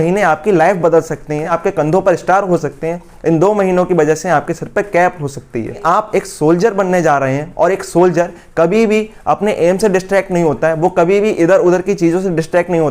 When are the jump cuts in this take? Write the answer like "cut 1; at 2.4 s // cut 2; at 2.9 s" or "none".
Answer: cut 1; at 1.5 s // cut 2; at 5.8 s